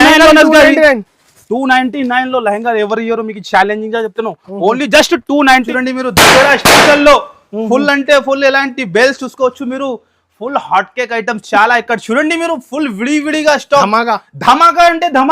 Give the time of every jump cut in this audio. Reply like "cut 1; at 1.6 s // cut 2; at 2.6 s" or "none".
cut 1; at 5.7 s